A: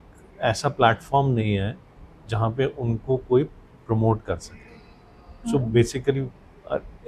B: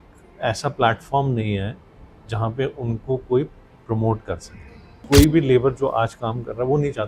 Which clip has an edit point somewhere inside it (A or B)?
B